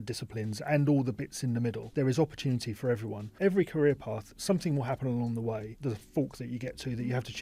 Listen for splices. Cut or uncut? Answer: cut